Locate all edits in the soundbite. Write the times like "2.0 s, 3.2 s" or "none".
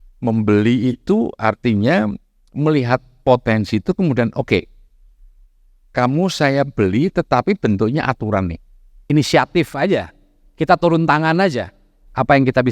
8.9 s